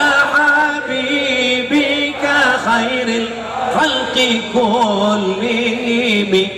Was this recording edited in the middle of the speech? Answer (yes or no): no